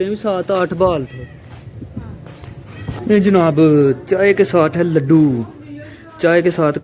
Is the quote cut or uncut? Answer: cut